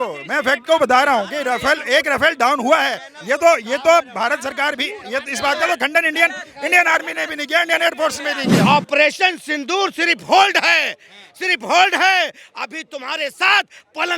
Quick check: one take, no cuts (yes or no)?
no